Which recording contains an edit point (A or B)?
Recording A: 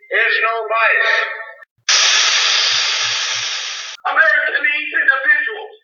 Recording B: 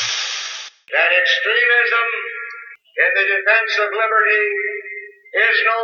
A